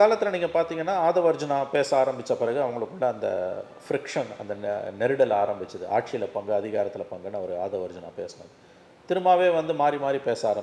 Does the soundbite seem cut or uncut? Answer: uncut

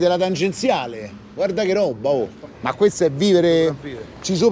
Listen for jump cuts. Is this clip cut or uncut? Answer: cut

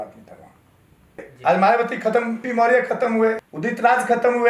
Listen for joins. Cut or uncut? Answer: cut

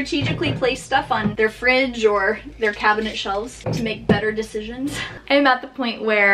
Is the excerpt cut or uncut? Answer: cut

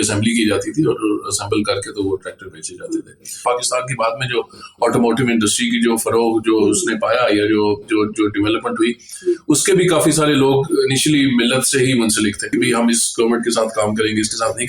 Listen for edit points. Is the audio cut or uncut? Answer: cut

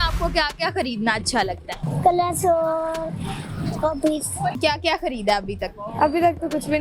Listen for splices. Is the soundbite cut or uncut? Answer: cut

